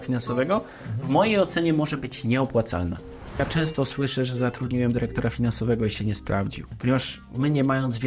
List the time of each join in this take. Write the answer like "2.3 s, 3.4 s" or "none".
3.4 s, 6.6 s